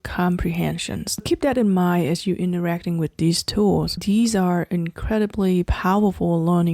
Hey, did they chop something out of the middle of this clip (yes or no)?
yes